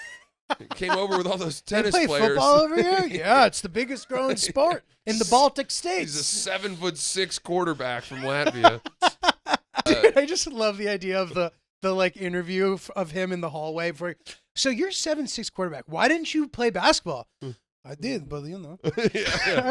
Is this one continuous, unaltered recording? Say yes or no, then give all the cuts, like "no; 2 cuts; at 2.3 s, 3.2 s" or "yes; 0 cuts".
no; 1 cut; at 9.8 s